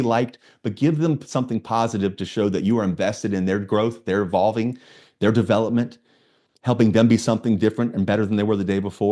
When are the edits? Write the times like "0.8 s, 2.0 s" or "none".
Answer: none